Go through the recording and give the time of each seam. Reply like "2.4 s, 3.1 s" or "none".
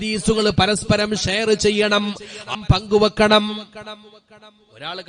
2.5 s